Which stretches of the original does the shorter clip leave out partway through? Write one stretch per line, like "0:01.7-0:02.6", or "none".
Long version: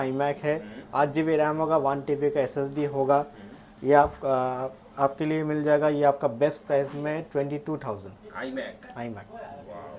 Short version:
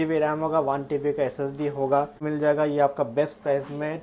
0:03.4-0:05.5